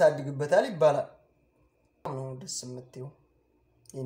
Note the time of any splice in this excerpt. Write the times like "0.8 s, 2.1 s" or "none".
2.1 s